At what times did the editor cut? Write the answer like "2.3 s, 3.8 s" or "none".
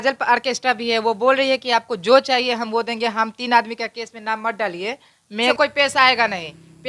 5.5 s